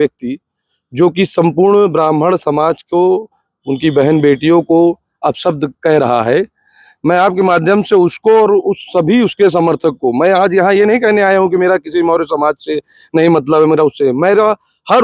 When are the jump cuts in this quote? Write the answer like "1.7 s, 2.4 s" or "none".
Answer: none